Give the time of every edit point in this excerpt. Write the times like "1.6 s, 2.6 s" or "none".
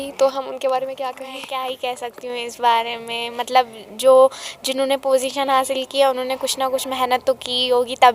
1.3 s

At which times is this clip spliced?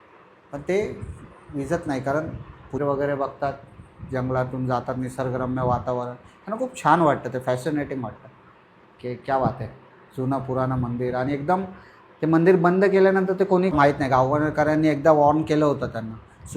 2.8 s, 13.8 s

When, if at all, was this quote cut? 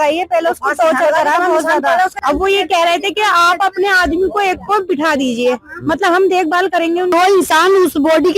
2.2 s, 7.1 s

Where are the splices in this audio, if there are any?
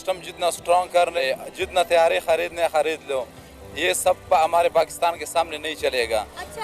1.2 s

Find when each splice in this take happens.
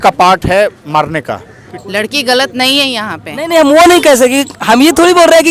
1.5 s

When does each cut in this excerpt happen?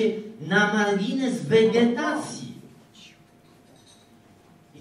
none

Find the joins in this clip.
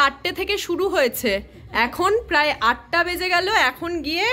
none

